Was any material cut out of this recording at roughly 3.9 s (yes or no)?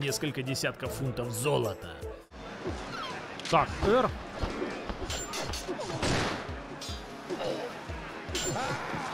no